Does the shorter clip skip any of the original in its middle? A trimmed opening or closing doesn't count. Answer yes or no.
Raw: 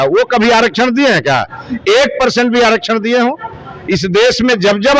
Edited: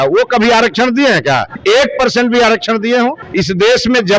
yes